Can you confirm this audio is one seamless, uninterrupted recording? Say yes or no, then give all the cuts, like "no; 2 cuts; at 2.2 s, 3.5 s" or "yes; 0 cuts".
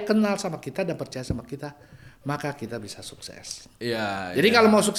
yes; 0 cuts